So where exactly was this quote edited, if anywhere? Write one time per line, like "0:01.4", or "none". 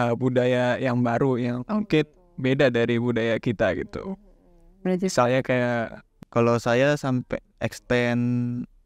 0:06.1